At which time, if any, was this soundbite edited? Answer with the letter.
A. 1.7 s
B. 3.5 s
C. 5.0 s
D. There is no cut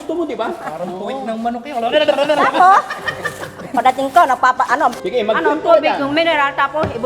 C